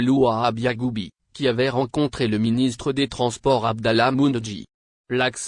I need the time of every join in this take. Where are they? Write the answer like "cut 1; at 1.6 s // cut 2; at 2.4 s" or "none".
none